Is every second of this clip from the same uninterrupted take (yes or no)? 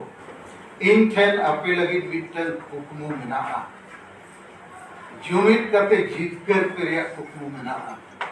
yes